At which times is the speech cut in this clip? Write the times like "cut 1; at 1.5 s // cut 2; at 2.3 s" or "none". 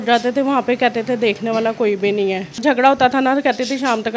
cut 1; at 2.6 s